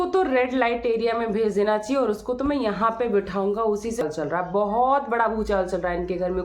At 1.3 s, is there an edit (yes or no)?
no